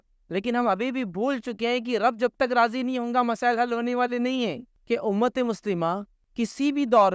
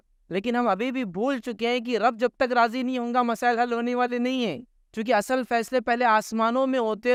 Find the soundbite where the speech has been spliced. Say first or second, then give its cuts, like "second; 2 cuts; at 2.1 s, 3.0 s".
first; 2 cuts; at 4.7 s, 6.2 s